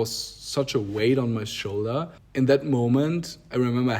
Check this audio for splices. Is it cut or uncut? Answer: cut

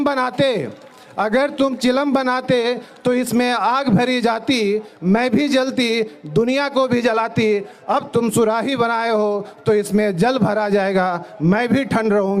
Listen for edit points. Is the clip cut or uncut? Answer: uncut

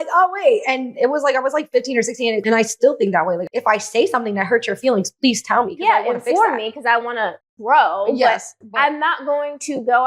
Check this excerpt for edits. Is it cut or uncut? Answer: cut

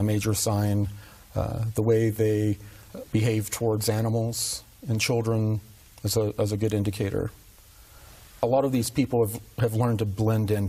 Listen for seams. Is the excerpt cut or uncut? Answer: uncut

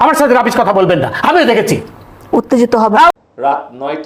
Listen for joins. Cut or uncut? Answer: cut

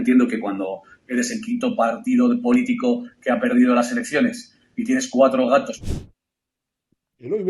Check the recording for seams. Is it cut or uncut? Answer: uncut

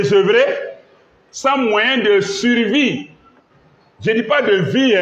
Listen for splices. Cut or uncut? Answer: uncut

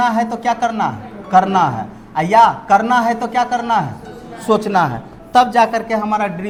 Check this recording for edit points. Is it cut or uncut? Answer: uncut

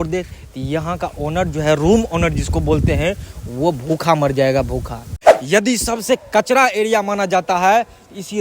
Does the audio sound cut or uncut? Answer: cut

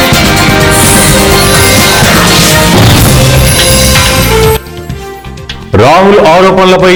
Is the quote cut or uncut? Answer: uncut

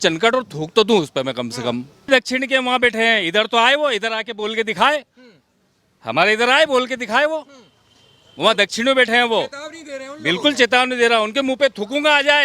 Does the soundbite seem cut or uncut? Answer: cut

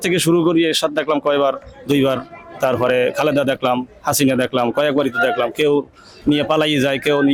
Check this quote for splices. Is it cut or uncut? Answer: uncut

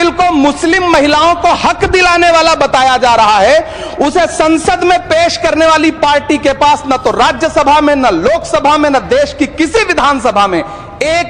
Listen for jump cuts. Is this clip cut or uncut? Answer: uncut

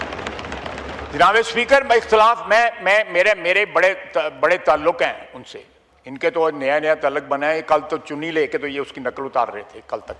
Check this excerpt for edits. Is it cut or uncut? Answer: uncut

